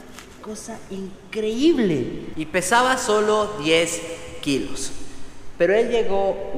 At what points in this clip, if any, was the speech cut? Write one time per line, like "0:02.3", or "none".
0:02.2